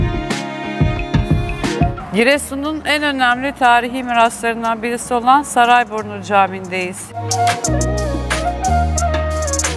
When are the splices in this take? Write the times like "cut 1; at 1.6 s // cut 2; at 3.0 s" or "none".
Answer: cut 1; at 1.9 s // cut 2; at 7.1 s

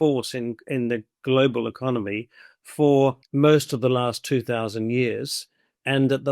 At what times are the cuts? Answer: cut 1; at 3.2 s

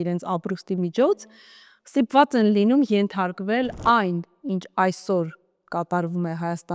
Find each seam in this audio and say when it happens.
cut 1; at 3.8 s

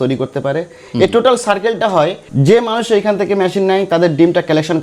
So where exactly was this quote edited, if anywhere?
cut 1; at 2.2 s

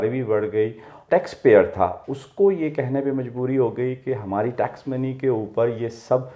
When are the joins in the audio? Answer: cut 1; at 0.9 s

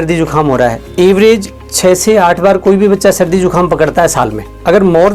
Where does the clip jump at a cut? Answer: none

